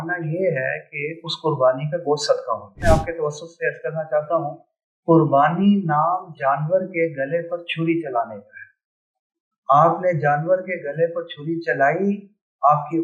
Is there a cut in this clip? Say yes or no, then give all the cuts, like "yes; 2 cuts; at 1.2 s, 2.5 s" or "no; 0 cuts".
yes; 1 cut; at 2.7 s